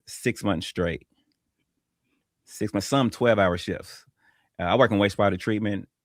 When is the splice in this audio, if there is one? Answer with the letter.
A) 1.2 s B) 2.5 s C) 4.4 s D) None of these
D